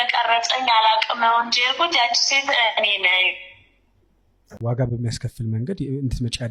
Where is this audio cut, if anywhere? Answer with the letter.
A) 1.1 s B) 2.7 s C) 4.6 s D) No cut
C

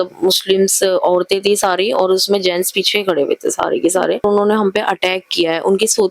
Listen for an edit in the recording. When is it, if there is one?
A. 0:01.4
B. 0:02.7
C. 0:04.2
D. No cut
C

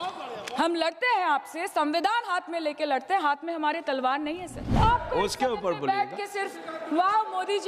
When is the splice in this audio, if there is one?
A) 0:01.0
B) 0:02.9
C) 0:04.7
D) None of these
C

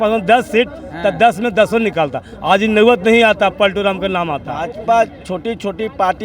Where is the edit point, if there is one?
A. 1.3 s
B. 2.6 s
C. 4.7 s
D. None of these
C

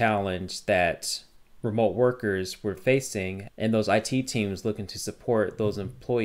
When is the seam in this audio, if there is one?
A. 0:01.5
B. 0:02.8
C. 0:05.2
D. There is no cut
B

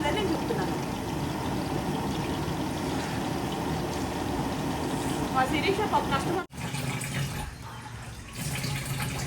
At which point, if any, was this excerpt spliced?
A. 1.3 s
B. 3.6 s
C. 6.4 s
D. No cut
C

